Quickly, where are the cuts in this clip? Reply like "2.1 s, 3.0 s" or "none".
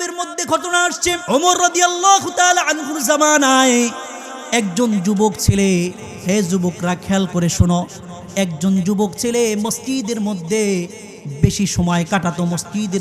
1.2 s